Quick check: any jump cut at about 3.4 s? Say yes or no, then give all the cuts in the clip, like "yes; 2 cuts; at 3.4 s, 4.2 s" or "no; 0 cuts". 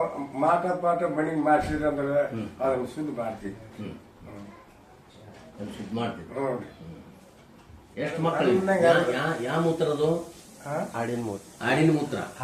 no; 1 cut; at 8.5 s